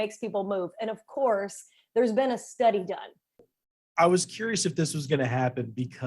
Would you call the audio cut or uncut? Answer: cut